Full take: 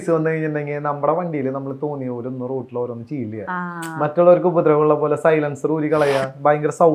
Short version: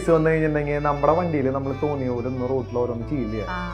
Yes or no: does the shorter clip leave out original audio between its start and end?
no